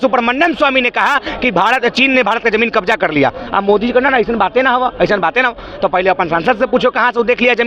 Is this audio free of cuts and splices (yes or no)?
yes